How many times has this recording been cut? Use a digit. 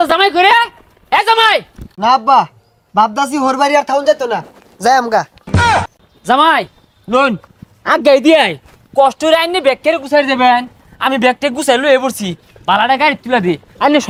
0